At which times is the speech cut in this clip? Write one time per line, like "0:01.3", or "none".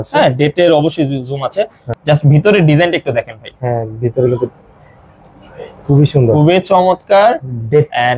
0:01.8